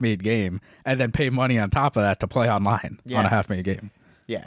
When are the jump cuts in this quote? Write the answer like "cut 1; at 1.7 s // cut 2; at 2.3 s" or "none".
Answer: none